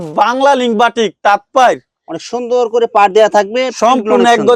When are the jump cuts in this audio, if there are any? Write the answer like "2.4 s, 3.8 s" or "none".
none